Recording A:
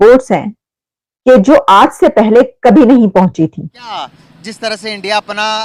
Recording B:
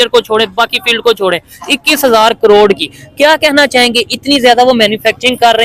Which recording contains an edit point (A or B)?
A